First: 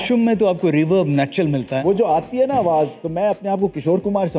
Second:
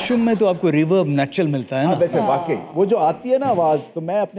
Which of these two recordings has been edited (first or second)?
first